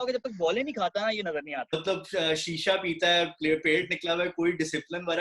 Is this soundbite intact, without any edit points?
no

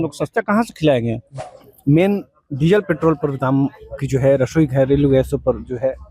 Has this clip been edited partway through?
yes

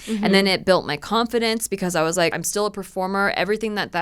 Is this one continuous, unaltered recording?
no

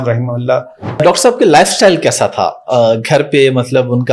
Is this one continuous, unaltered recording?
no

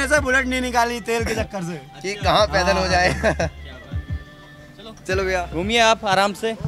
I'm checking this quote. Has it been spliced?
no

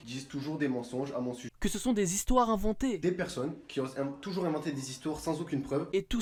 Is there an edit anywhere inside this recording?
no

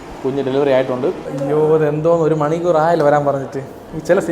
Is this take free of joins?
no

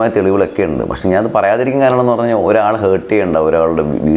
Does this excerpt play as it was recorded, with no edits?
yes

